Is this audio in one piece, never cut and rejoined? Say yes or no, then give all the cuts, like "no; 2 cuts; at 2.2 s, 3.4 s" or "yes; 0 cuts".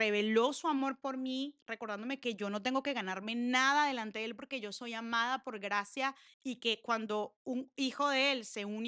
no; 1 cut; at 6.3 s